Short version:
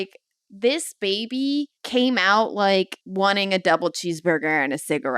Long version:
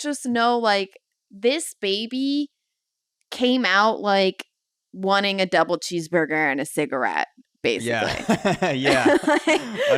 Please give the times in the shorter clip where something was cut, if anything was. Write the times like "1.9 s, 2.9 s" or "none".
1.8 s, 3.0 s